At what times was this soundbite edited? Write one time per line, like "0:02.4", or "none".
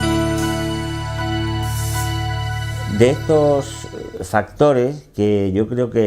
0:02.7